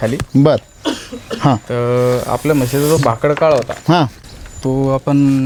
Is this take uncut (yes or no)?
yes